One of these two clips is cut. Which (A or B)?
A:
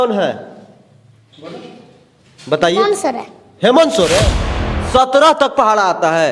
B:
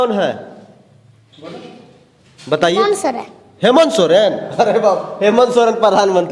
A